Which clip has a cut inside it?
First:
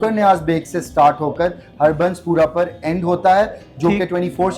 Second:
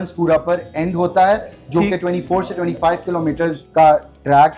second; 1 cut; at 3.6 s

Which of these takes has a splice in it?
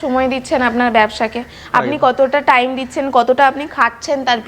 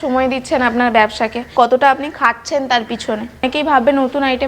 second; 2 cuts; at 1.5 s, 3.4 s

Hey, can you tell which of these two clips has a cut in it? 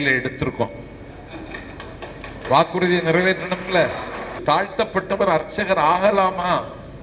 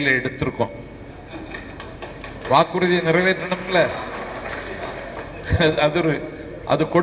first; 1 cut; at 4.4 s

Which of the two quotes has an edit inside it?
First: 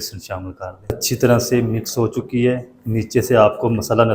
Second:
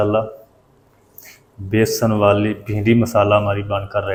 first; 1 cut; at 1.0 s

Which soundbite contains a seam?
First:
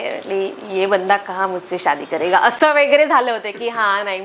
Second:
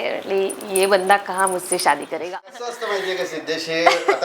second; 1 cut; at 2.2 s

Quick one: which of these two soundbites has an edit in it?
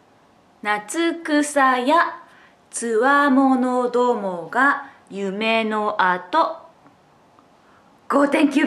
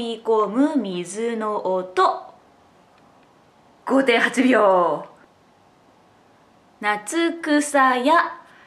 second; 1 cut; at 5.2 s

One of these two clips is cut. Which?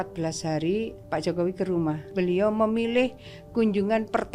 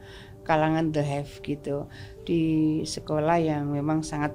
first; 2 cuts; at 1.0 s, 2.1 s

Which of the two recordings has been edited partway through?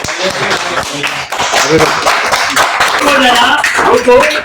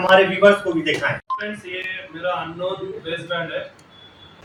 first; 1 cut; at 3.0 s

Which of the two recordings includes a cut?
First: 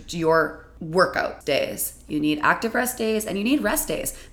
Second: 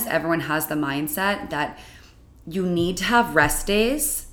first; 1 cut; at 1.4 s

